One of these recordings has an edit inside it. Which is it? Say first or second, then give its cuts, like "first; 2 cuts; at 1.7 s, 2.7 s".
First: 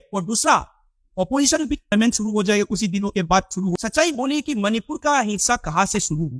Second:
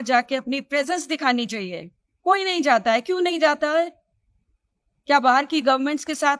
first; 2 cuts; at 1.9 s, 3.7 s